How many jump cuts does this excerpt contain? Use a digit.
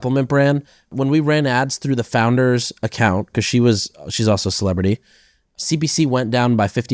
2